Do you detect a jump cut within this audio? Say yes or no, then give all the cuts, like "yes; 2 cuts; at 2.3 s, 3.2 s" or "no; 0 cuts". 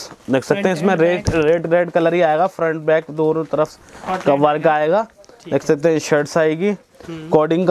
no; 0 cuts